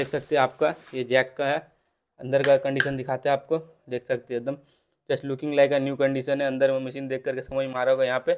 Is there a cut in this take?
no; 0 cuts

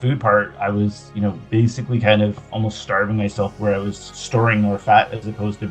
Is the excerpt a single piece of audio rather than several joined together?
yes; 0 cuts

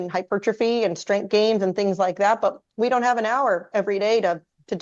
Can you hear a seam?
no; 0 cuts

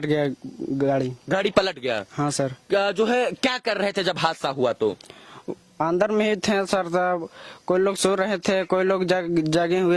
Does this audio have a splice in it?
no; 0 cuts

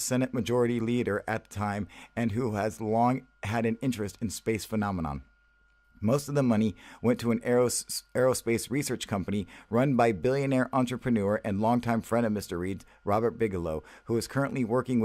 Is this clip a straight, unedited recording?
no; 1 cut; at 7.3 s

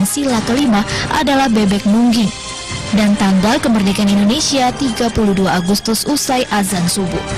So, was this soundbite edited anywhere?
yes; 1 cut; at 4.4 s

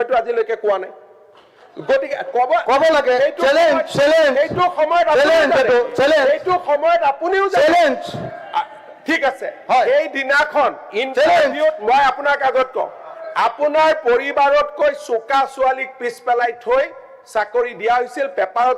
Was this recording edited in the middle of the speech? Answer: no; 0 cuts

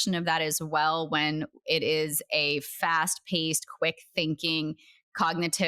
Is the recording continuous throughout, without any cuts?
yes; 0 cuts

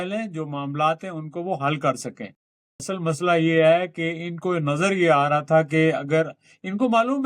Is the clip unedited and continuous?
no; 1 cut; at 2.8 s

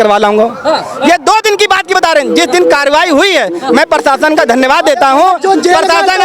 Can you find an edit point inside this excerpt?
no; 0 cuts

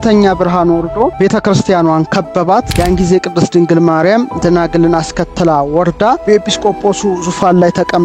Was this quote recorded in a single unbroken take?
no; 3 cuts; at 1.1 s, 2.7 s, 6.2 s

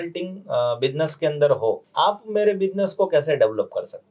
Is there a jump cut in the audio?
yes; 1 cut; at 1.9 s

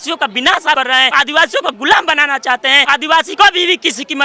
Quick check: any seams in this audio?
yes; 2 cuts; at 0.8 s, 3.1 s

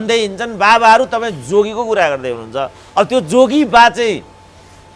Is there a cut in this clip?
no; 0 cuts

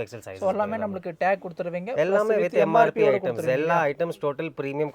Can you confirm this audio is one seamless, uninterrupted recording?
yes; 0 cuts

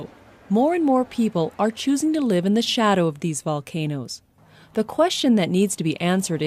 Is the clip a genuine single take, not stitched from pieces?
yes; 0 cuts

